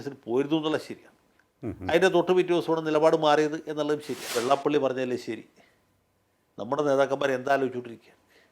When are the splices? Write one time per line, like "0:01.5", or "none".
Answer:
0:04.4